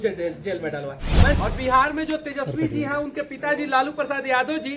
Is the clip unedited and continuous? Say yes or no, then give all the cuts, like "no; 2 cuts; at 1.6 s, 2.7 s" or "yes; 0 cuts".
no; 1 cut; at 1.3 s